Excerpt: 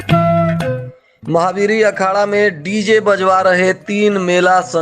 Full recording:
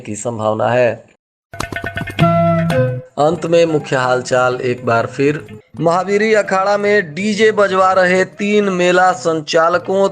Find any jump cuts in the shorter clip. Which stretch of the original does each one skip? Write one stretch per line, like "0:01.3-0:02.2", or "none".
0:03.0-0:05.5